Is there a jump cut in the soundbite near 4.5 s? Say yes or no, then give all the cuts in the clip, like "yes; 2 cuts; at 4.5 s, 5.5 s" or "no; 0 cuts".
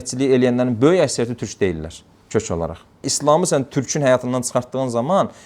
no; 1 cut; at 2.9 s